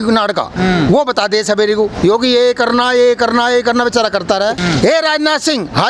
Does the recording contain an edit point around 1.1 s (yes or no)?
no